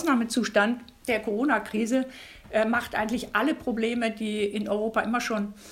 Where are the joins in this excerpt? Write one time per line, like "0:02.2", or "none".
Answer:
0:00.9